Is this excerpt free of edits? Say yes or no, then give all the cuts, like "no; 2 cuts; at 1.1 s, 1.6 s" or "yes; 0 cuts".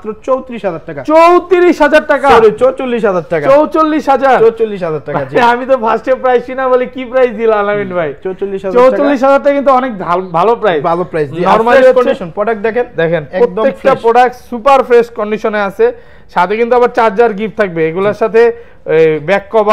yes; 0 cuts